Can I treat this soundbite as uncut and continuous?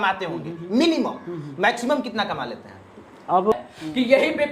no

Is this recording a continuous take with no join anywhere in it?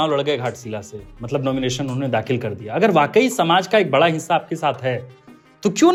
yes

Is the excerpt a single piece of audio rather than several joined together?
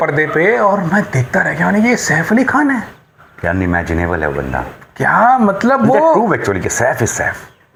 yes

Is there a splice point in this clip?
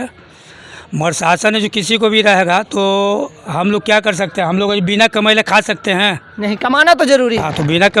no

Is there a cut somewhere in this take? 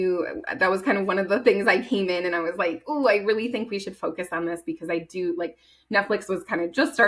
no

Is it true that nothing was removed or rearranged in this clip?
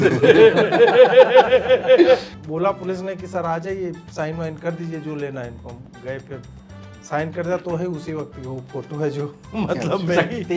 no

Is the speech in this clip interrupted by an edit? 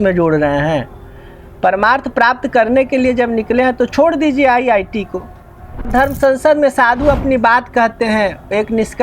yes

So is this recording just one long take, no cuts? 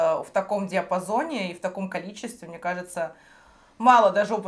yes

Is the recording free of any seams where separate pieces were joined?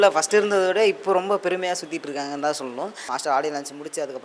no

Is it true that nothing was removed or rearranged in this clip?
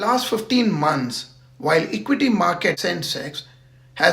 no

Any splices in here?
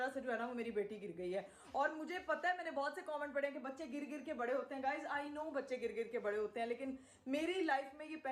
no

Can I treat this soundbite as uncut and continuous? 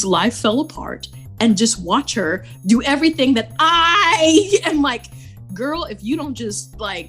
yes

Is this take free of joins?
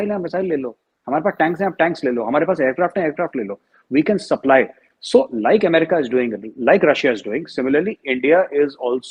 yes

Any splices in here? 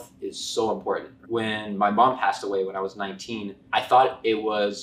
yes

